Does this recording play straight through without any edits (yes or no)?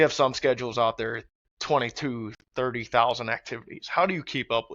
yes